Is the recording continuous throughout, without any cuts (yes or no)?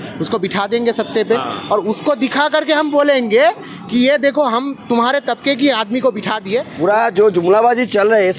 no